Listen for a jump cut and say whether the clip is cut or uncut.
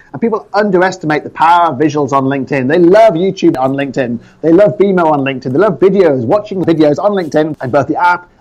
cut